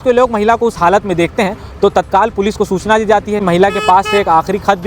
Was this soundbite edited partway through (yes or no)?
yes